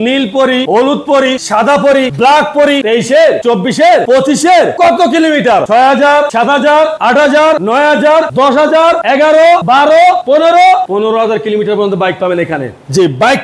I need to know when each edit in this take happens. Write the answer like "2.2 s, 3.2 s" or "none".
2.8 s